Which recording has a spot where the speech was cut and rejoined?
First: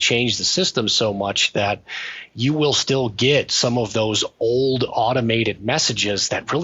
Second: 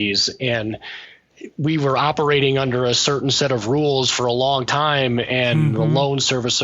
second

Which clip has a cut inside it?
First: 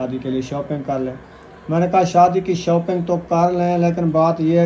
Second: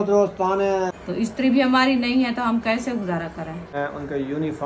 second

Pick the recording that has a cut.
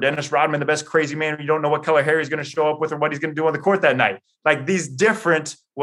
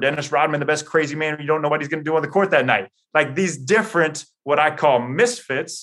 second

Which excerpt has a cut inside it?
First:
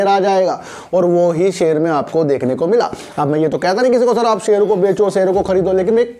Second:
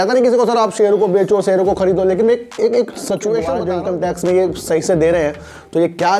second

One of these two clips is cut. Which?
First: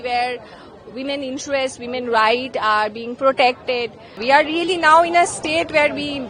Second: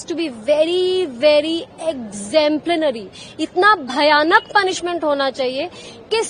first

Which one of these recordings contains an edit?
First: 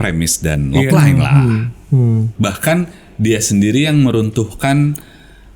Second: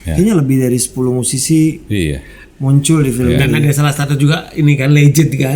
first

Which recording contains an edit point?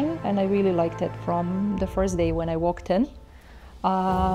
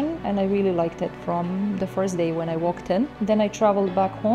second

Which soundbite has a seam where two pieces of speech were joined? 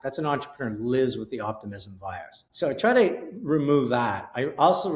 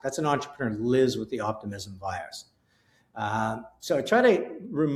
first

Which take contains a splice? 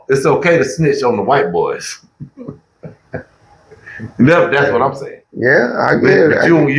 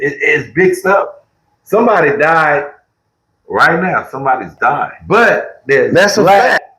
second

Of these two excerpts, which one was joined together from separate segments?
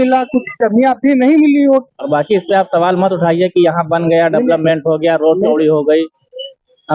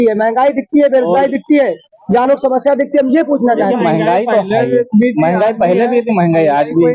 first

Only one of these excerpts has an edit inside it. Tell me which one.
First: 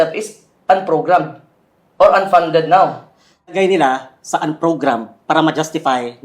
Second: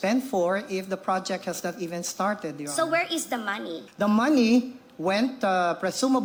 first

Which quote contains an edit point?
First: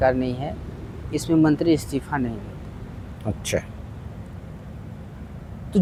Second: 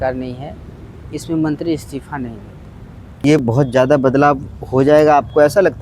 second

